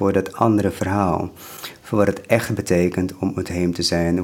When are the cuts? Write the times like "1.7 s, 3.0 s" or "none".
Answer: none